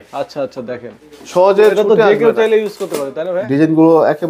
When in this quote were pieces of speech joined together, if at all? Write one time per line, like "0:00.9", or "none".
0:03.2